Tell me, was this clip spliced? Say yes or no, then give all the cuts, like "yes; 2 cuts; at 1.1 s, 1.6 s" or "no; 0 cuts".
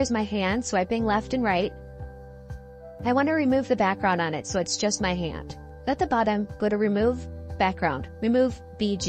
no; 0 cuts